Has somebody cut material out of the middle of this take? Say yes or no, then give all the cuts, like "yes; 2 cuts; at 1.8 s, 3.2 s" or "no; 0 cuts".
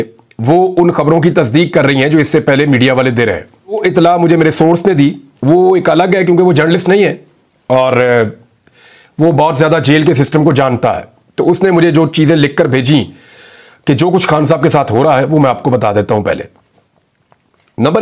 yes; 1 cut; at 3.8 s